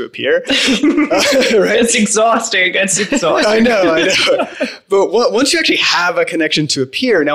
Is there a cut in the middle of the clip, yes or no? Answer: no